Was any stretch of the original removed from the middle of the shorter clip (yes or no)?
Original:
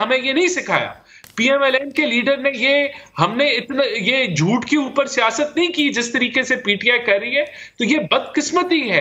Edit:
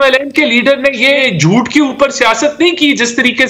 yes